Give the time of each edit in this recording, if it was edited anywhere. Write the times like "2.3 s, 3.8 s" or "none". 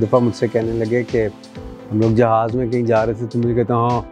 none

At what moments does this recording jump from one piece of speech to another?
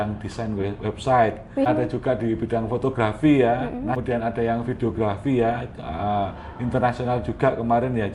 1.7 s, 4.0 s

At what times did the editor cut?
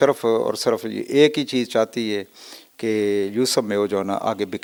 none

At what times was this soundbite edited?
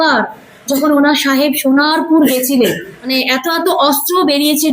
3.1 s

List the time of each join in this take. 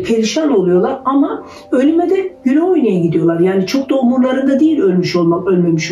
none

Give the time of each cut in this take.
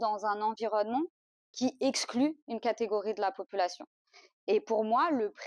none

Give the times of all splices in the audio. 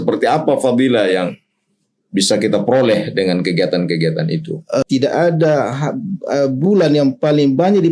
4.8 s

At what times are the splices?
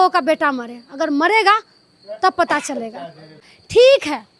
3.5 s

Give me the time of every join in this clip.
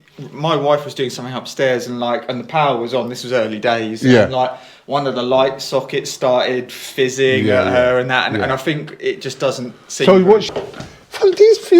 10.5 s

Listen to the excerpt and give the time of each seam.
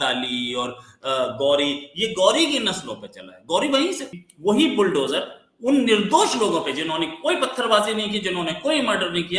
4.2 s

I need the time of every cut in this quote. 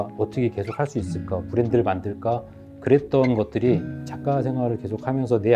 none

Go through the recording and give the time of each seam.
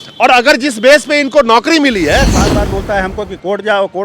2.4 s

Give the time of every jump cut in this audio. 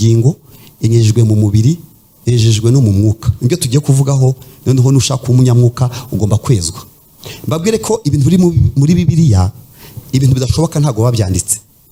none

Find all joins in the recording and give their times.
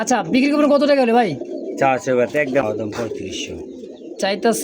2.6 s

